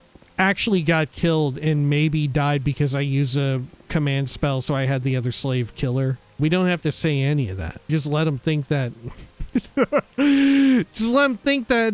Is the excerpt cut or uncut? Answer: cut